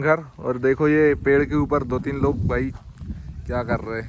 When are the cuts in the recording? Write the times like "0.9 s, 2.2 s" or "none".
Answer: none